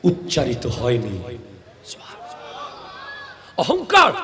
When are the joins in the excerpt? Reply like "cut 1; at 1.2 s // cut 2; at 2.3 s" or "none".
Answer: none